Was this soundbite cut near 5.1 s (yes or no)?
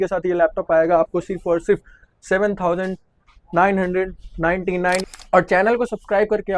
yes